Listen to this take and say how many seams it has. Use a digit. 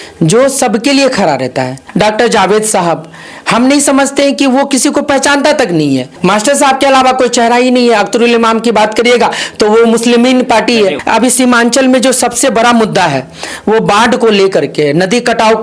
3